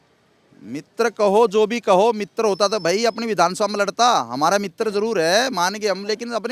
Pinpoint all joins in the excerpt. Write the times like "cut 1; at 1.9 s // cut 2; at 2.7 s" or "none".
none